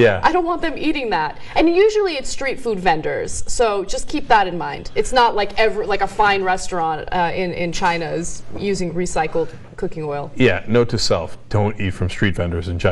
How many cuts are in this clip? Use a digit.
1